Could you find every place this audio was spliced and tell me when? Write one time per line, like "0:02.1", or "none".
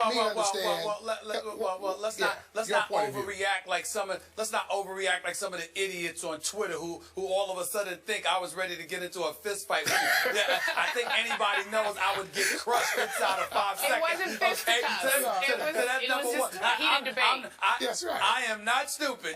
none